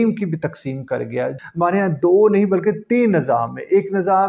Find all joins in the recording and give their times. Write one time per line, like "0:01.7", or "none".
0:01.4